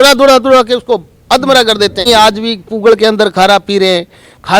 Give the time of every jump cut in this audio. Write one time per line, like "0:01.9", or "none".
0:02.1